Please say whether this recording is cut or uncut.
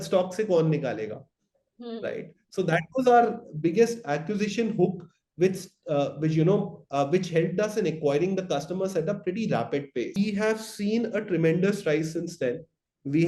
cut